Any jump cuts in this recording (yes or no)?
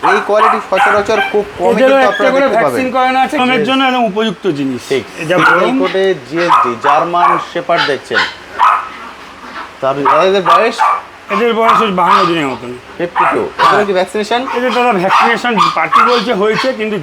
yes